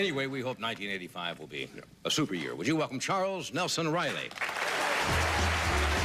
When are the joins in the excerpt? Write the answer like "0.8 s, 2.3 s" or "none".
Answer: 3.3 s